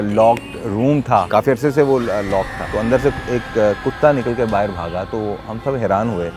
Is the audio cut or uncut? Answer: cut